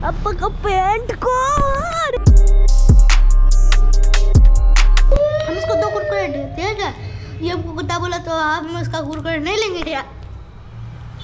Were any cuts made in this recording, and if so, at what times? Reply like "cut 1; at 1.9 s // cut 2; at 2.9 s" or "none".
cut 1; at 2.2 s